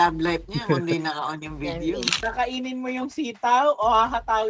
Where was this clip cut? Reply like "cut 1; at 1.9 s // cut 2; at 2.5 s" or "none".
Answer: cut 1; at 2.2 s